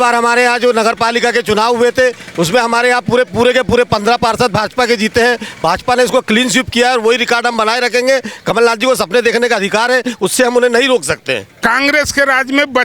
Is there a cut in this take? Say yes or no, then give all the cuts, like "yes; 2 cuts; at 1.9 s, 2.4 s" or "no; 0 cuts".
yes; 1 cut; at 11.5 s